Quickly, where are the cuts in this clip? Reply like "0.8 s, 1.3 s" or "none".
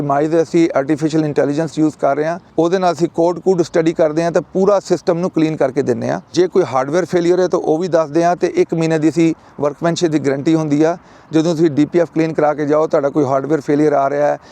2.4 s, 6.3 s